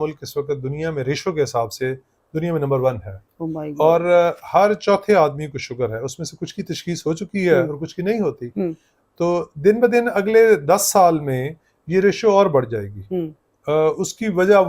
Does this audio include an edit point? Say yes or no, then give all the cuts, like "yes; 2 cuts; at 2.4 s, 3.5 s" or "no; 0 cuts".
no; 0 cuts